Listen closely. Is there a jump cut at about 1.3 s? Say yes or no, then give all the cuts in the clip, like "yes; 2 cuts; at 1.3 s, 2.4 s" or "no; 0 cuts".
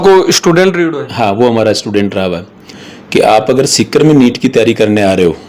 no; 1 cut; at 2.6 s